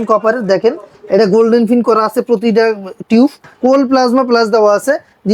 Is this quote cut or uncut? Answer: cut